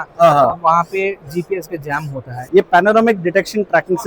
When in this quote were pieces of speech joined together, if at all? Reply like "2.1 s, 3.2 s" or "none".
2.5 s